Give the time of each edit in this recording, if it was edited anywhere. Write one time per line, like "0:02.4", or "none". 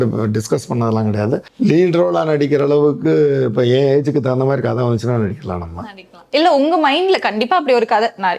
0:01.5